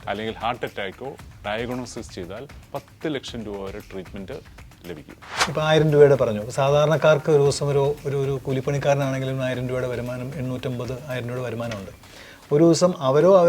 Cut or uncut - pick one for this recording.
cut